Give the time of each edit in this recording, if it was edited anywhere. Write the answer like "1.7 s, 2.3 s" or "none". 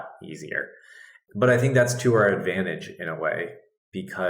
1.2 s